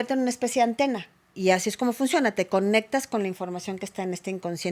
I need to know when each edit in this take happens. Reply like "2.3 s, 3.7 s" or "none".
1.2 s